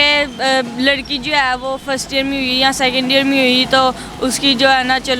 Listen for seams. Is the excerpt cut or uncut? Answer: uncut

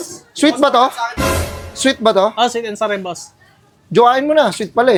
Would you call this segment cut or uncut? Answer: uncut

